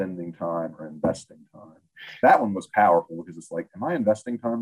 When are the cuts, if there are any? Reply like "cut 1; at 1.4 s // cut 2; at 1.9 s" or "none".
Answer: cut 1; at 2.0 s